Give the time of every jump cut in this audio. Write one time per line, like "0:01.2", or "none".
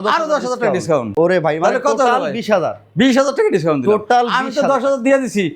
none